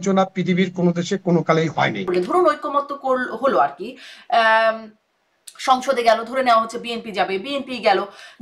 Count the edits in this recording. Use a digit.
1